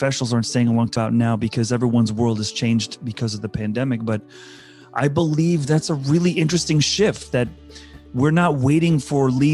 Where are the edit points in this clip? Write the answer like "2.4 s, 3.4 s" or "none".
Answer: 0.9 s